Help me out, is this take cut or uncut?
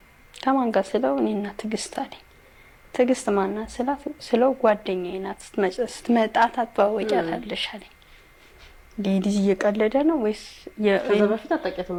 uncut